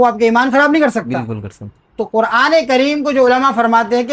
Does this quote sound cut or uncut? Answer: uncut